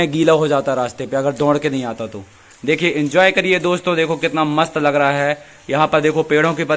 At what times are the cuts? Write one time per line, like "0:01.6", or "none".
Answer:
none